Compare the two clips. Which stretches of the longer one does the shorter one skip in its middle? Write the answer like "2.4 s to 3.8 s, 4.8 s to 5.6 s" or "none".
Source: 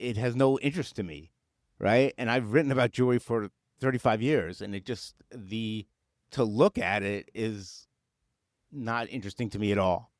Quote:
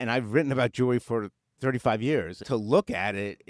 4.6 s to 6.2 s